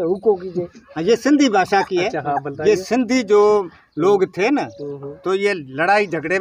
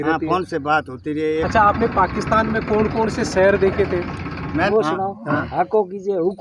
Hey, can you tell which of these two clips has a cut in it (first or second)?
second